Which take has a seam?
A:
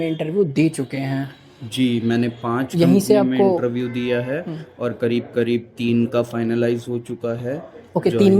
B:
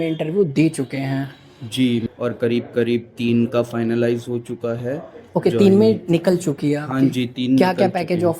B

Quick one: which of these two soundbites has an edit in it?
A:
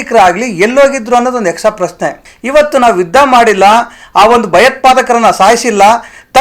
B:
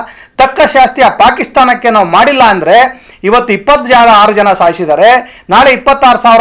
A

